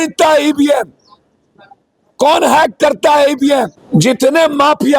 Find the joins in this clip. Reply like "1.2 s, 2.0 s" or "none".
3.8 s